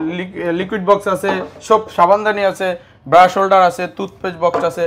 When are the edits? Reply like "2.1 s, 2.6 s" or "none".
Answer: none